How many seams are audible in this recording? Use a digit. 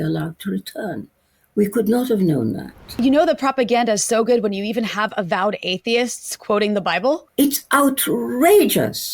2